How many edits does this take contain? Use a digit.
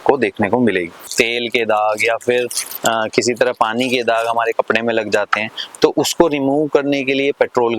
1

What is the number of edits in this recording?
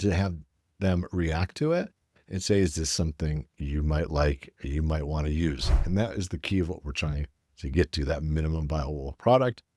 0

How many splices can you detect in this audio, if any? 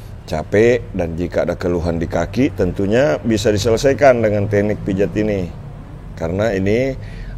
0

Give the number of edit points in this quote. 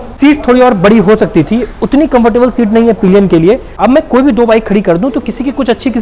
1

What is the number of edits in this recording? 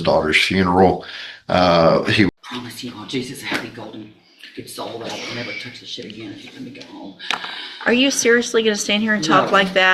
1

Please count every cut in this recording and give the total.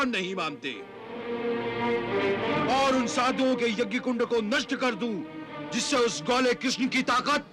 2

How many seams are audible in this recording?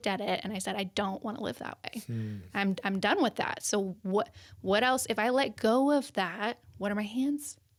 0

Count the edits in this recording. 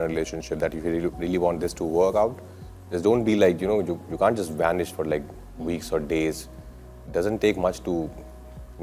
0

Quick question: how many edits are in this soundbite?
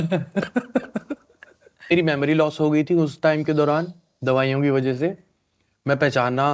1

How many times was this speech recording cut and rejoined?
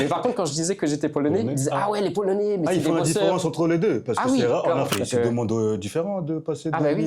1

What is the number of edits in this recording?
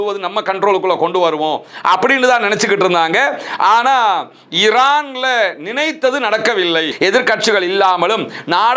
1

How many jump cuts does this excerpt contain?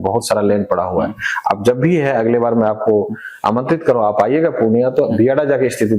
0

